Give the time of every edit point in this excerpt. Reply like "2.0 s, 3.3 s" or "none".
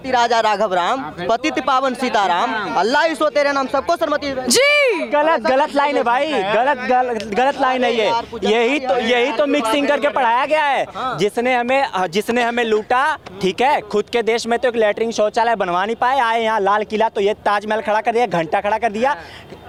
none